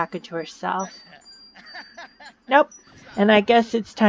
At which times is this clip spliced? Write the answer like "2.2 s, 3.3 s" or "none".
3.0 s

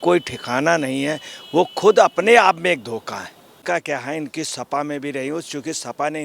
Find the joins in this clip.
3.5 s

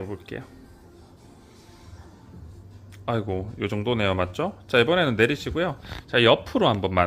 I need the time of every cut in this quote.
none

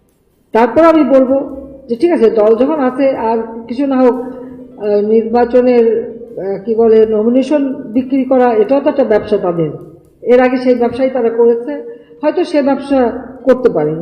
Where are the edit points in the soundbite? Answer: none

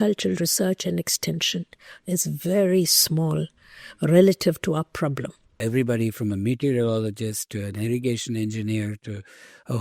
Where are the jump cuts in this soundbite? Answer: 5.6 s

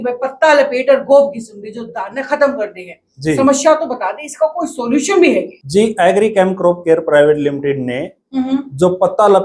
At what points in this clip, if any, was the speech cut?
5.6 s

